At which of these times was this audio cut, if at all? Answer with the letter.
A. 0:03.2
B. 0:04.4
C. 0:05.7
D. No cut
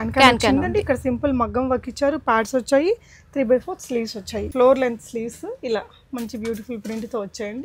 B